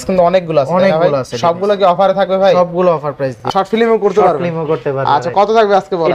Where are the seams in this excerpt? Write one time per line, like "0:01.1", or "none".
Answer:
0:03.3